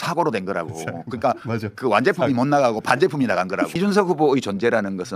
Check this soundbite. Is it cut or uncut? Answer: cut